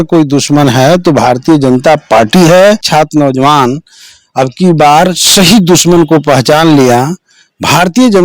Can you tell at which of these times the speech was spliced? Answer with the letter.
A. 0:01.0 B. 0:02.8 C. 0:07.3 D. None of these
B